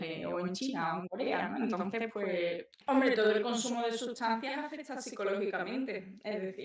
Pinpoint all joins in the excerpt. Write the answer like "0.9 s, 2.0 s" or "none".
2.7 s

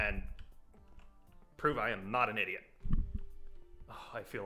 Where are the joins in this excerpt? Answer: none

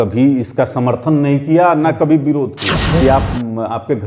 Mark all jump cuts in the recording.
3.0 s

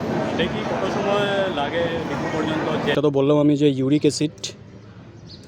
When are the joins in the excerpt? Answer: 2.9 s

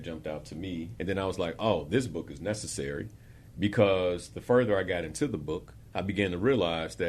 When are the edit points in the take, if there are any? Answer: none

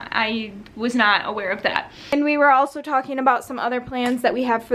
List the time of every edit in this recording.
2.1 s

